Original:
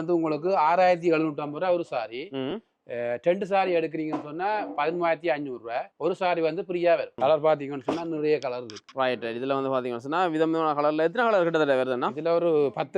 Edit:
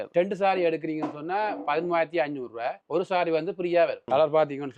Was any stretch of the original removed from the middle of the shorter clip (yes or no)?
no